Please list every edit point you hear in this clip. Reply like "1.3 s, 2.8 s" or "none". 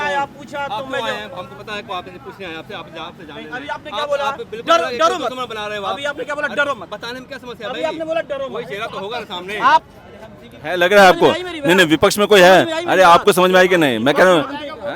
9.9 s